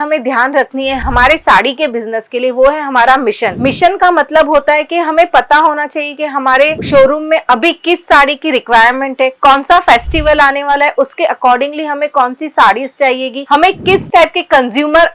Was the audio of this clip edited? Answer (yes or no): no